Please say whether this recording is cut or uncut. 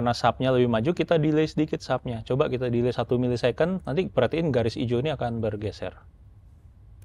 uncut